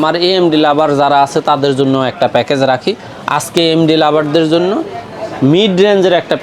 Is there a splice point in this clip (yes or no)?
no